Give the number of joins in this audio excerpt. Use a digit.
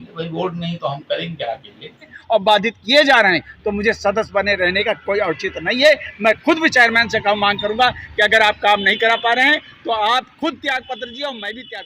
1